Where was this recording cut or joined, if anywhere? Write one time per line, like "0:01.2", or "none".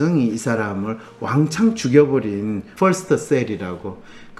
0:02.6